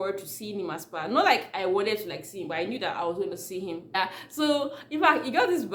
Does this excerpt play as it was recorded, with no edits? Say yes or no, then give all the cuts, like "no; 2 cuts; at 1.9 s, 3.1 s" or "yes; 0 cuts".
yes; 0 cuts